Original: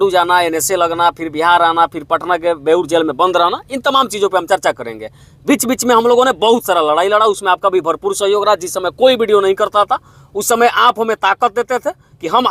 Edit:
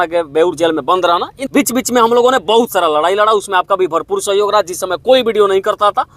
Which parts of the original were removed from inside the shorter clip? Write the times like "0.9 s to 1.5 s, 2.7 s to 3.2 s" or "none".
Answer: 3.7 s to 5.3 s

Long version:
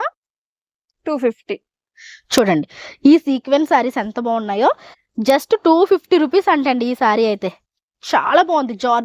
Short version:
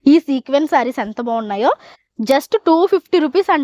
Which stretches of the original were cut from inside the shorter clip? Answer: none

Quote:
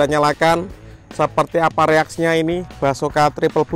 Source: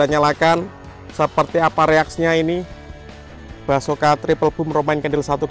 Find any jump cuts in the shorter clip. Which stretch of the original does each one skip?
2.7 s to 3.6 s

